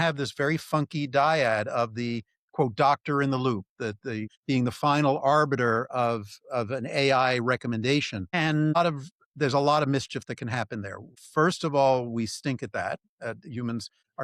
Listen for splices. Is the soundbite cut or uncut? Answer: uncut